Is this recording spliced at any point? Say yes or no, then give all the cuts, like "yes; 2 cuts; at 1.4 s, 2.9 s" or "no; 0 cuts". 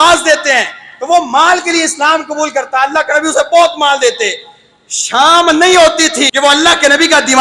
yes; 1 cut; at 6.3 s